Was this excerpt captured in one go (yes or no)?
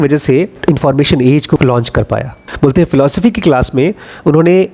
no